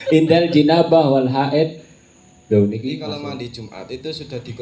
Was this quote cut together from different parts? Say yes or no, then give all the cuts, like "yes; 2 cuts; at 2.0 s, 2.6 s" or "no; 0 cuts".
yes; 1 cut; at 3.2 s